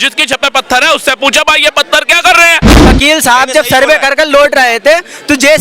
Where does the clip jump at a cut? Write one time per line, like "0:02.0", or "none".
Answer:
0:02.8